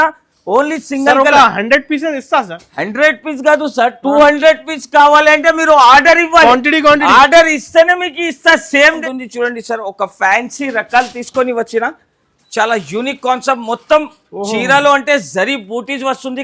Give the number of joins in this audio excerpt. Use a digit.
1